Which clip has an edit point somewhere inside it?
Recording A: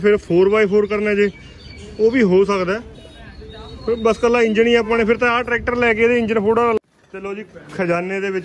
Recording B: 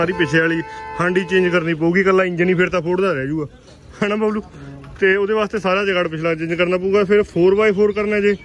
A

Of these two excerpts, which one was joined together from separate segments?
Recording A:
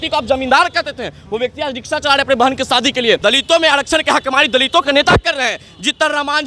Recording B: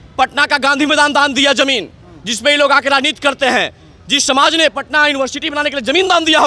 A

